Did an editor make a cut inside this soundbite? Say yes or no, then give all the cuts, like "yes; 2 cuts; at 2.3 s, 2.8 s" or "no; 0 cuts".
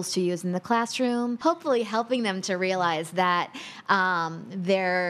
yes; 1 cut; at 1.4 s